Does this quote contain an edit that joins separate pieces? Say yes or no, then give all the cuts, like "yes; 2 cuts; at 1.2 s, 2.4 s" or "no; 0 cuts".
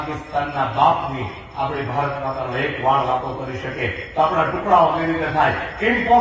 no; 0 cuts